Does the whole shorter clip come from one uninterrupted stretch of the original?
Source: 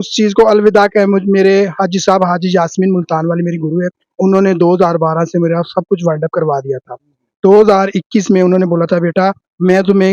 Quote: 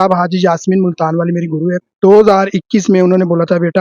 no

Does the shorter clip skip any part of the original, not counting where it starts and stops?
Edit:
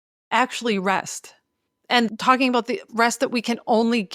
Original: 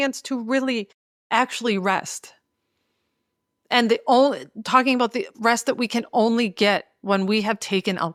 yes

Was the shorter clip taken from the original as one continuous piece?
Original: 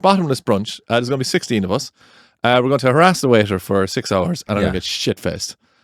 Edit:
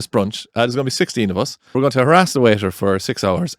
no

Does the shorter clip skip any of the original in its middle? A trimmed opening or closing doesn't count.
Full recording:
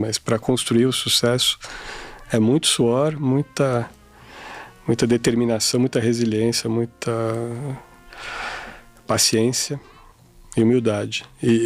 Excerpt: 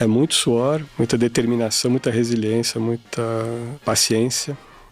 yes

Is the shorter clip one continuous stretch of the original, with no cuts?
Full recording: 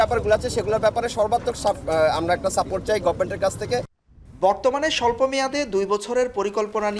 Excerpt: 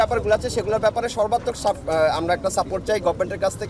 yes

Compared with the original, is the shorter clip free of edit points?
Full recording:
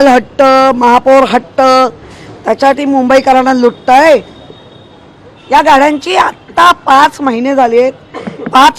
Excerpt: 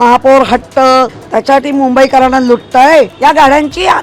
no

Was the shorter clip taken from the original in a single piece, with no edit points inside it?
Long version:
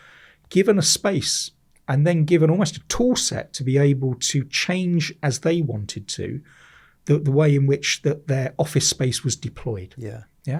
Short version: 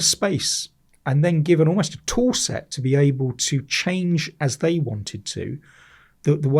yes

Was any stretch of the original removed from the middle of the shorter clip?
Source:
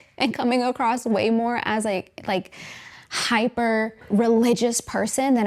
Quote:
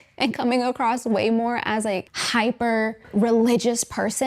yes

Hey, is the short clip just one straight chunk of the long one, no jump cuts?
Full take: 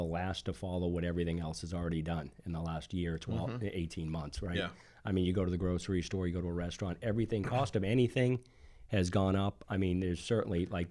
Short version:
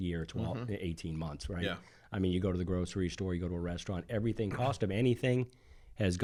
yes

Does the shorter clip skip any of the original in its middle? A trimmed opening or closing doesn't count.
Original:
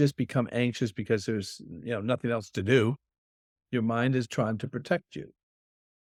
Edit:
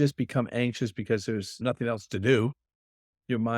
yes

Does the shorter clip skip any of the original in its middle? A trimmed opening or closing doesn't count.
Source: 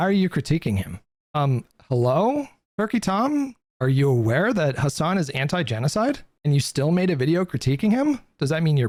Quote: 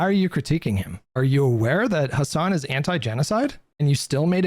yes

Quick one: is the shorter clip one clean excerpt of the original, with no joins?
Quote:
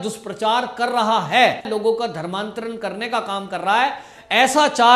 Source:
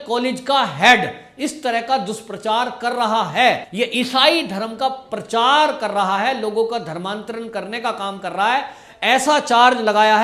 no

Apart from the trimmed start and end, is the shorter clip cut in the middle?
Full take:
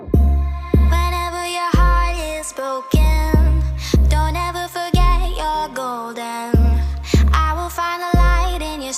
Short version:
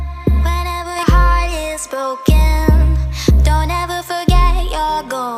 yes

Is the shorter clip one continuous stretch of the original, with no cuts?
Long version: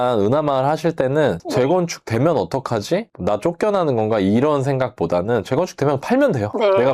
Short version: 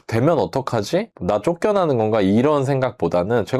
yes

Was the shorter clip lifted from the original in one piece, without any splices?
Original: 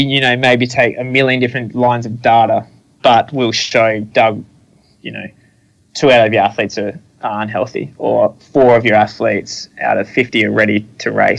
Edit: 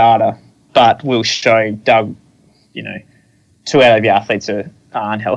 yes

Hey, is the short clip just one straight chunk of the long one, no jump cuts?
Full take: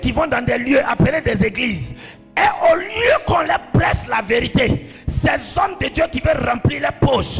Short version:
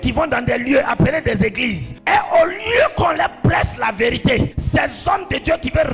no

